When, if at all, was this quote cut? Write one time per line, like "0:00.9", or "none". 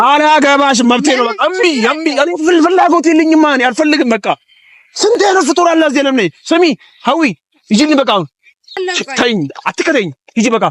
0:08.8